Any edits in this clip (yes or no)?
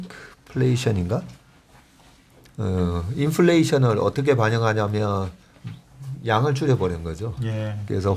no